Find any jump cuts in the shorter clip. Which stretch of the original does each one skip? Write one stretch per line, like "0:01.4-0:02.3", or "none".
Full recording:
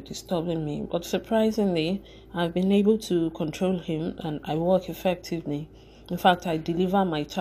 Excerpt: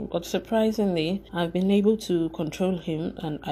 0:02.0-0:02.3